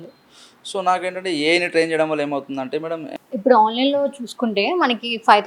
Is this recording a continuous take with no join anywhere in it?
no; 1 cut; at 3.1 s

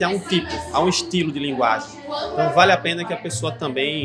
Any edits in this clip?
no; 0 cuts

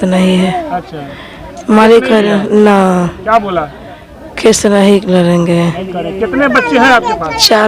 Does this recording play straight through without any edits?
yes; 0 cuts

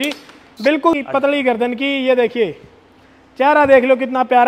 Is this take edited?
yes; 1 cut; at 1.0 s

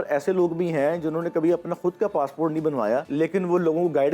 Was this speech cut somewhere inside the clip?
yes; 1 cut; at 3.1 s

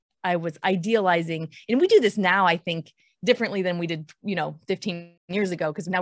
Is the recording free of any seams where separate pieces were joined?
no; 1 cut; at 5.1 s

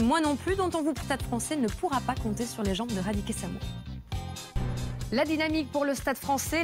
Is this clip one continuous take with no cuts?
yes; 0 cuts

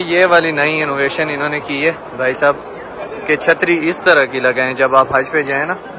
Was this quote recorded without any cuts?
yes; 0 cuts

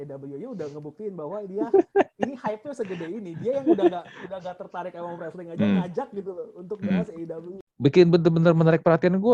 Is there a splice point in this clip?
yes; 1 cut; at 7.6 s

